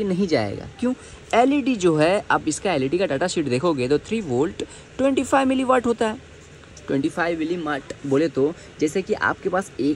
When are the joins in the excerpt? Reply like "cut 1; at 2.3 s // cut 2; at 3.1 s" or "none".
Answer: none